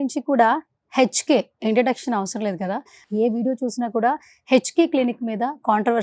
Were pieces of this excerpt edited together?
yes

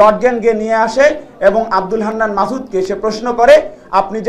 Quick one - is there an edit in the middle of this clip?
no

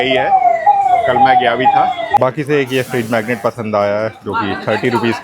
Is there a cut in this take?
yes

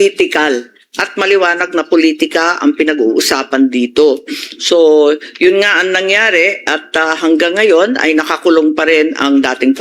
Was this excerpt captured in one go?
yes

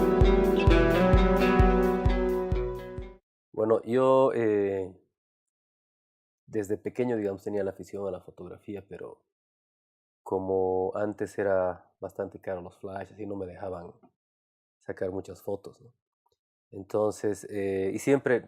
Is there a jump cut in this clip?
yes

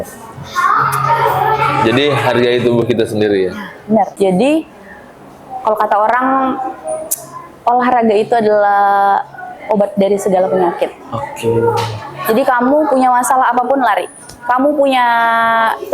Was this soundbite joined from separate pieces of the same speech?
yes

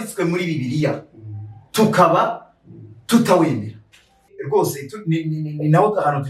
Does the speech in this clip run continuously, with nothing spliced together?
no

